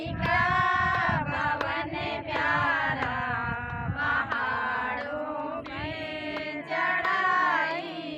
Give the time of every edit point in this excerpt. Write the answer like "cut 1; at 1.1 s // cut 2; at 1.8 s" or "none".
none